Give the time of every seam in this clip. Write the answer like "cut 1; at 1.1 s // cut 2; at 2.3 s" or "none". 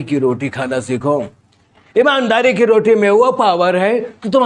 none